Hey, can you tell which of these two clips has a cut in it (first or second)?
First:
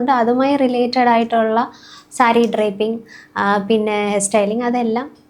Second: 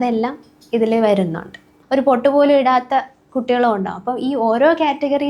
second